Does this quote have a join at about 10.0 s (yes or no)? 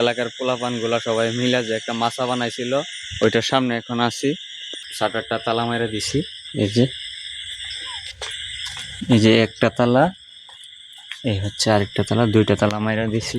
no